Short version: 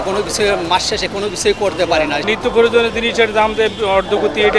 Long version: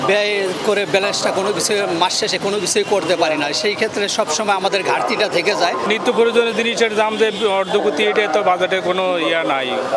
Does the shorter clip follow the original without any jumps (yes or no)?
no